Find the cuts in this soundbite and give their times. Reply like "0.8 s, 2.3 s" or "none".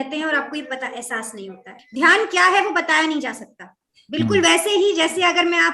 1.8 s